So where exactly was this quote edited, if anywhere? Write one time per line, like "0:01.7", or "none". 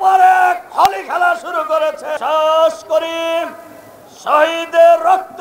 0:02.2